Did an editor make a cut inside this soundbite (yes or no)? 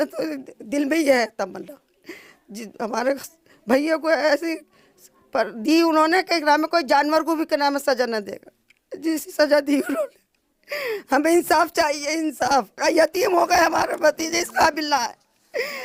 no